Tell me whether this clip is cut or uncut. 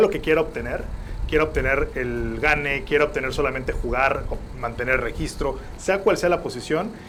uncut